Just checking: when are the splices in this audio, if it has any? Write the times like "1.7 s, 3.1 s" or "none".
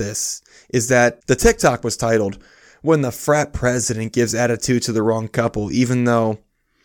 1.2 s